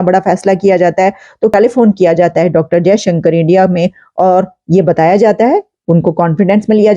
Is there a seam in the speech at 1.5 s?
yes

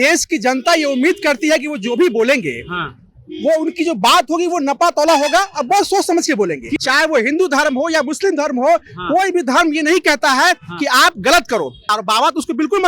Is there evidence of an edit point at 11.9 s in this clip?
yes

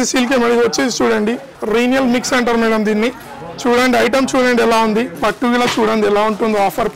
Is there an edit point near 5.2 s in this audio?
yes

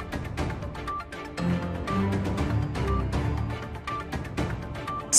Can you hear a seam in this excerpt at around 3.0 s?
yes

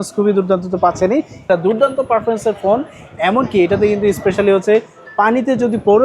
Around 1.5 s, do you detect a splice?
yes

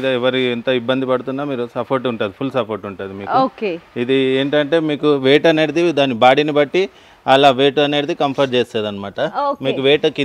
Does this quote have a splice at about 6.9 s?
no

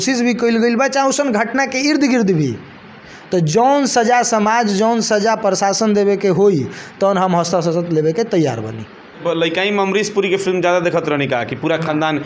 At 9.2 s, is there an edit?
yes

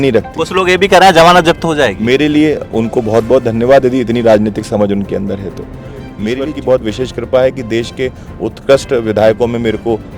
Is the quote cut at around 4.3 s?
no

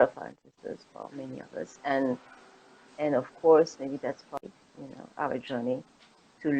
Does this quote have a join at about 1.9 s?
no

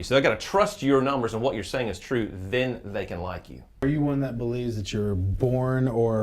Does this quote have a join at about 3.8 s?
yes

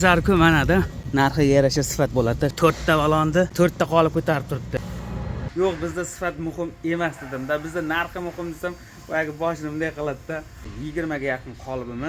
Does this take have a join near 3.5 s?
yes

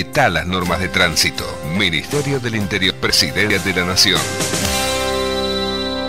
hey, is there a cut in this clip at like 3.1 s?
yes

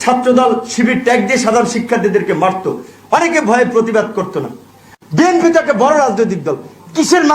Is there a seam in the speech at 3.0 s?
no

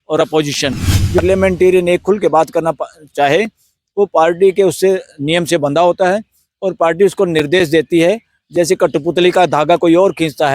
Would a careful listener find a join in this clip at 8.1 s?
no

